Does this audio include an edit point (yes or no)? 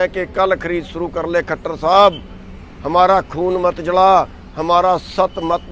no